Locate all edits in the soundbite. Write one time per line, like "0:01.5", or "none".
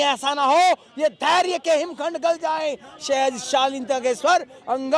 none